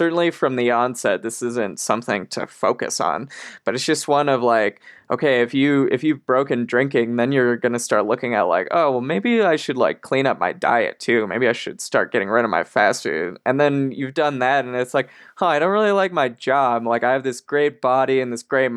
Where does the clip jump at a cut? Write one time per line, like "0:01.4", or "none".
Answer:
none